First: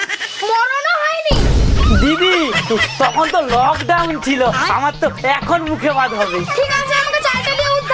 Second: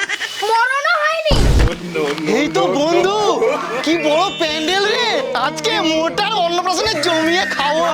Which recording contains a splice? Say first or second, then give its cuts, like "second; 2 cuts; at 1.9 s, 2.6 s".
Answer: second; 1 cut; at 1.6 s